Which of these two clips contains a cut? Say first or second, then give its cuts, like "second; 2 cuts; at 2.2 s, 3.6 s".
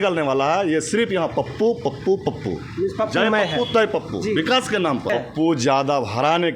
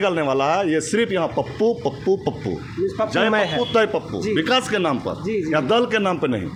first; 1 cut; at 5.1 s